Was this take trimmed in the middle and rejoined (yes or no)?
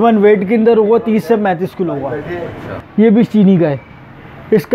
yes